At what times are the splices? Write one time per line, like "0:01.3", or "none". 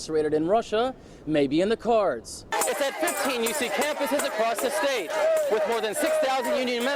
0:02.5